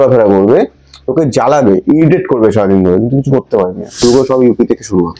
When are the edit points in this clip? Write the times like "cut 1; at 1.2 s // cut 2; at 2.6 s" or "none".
cut 1; at 4.0 s